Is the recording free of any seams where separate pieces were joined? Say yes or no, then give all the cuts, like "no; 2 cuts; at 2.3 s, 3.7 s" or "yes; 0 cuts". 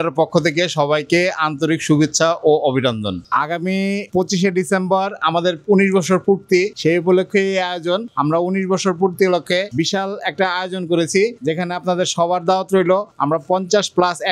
yes; 0 cuts